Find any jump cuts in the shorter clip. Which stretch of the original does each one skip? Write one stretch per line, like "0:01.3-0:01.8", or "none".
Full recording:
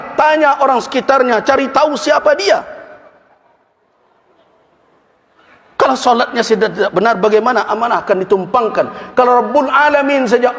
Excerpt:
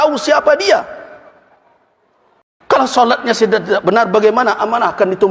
0:04.3-0:05.6